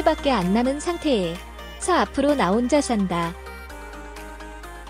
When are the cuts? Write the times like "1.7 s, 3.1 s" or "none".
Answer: 3.3 s